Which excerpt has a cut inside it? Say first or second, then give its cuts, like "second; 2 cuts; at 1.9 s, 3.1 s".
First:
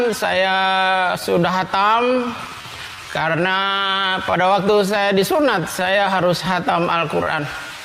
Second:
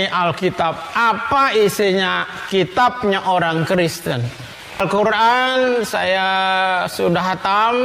second; 1 cut; at 4.8 s